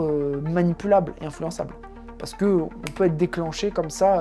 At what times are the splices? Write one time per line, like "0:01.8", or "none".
none